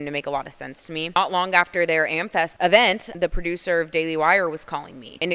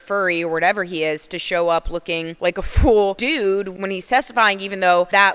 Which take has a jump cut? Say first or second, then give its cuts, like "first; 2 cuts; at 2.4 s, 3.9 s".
first; 3 cuts; at 1.1 s, 2.5 s, 3.1 s